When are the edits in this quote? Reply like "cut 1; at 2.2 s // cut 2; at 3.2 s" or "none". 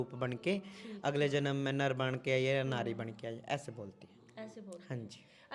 none